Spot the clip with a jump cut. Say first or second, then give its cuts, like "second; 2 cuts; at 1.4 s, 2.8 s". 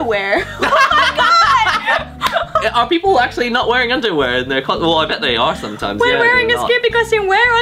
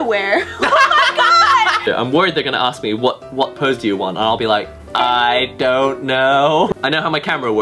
second; 2 cuts; at 1.8 s, 6.7 s